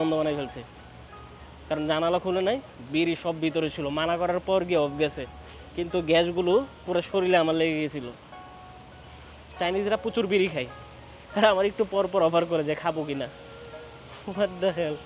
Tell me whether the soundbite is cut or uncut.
uncut